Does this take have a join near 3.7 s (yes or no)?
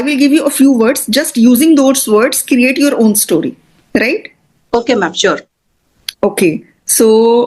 no